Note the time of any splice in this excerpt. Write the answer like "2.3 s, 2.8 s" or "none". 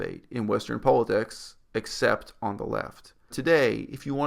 3.3 s